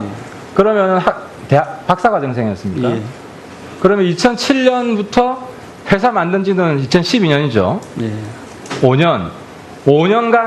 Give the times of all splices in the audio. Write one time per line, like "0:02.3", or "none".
0:02.8